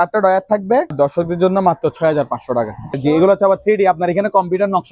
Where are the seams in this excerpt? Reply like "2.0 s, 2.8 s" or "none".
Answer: 0.9 s, 3.0 s